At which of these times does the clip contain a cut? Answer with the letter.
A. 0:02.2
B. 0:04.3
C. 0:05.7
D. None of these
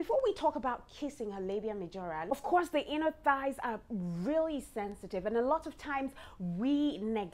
A